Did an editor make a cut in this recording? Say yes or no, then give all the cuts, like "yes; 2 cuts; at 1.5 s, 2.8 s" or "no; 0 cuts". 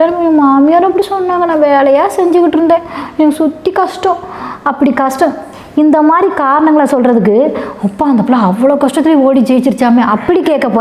no; 0 cuts